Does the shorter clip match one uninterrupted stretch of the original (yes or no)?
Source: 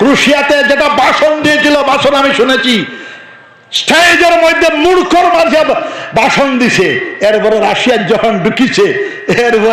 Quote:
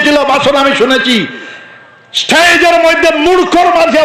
yes